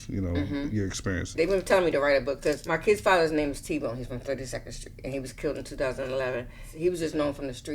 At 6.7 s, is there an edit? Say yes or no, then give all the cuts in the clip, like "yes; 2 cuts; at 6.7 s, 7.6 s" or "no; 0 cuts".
yes; 3 cuts; at 1.3 s, 2.6 s, 6.7 s